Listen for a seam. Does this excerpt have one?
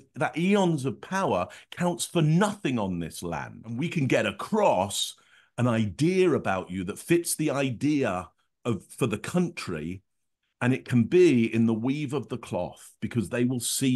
yes; 1 cut; at 3.8 s

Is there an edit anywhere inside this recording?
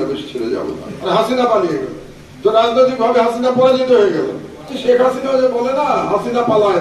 yes; 2 cuts; at 0.9 s, 4.7 s

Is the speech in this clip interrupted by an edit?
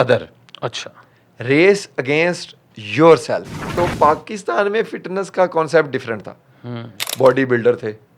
yes; 1 cut; at 3.6 s

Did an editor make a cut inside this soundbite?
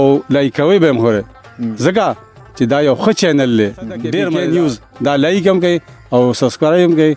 yes; 1 cut; at 4.2 s

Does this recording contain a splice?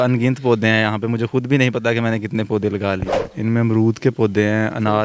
yes; 1 cut; at 3.2 s

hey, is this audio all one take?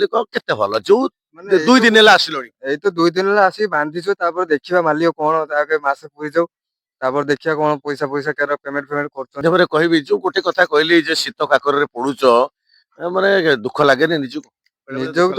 no; 1 cut; at 9.4 s

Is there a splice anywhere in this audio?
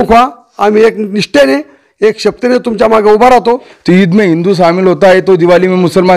yes; 1 cut; at 3.7 s

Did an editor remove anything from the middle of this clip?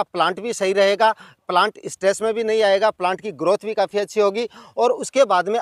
no; 0 cuts

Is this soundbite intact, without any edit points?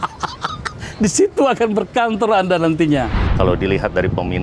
no; 1 cut; at 3.2 s

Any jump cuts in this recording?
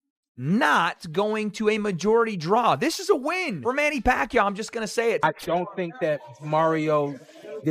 yes; 1 cut; at 5.2 s

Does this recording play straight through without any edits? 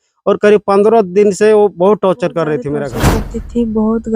no; 1 cut; at 2.8 s

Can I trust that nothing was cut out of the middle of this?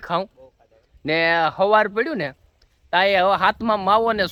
yes; 0 cuts

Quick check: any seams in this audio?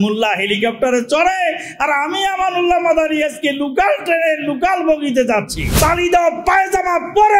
yes; 1 cut; at 5.6 s

